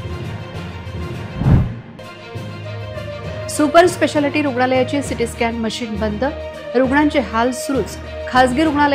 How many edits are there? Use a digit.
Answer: 0